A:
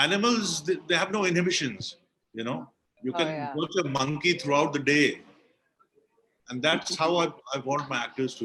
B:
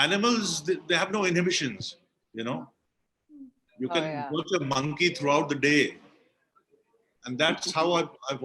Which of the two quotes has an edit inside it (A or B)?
A